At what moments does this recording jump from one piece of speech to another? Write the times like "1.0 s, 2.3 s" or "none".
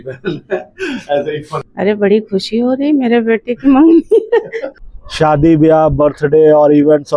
1.6 s, 4.7 s